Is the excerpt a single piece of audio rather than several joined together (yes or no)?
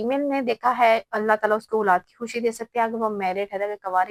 yes